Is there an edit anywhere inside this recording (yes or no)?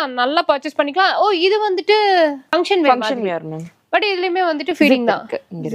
no